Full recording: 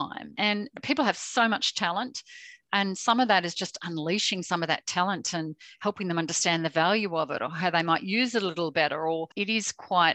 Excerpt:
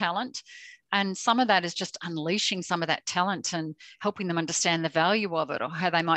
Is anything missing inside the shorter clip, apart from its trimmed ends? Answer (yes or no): no